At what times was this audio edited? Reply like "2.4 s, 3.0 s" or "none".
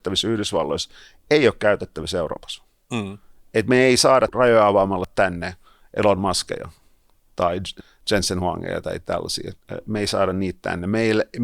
none